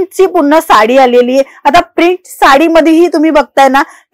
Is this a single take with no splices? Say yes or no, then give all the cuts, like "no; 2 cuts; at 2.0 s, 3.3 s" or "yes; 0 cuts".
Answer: yes; 0 cuts